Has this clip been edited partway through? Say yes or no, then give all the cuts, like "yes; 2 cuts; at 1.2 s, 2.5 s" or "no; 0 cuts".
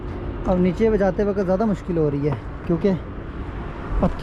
no; 0 cuts